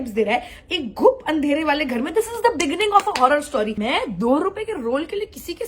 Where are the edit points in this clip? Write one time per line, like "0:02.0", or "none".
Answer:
0:03.7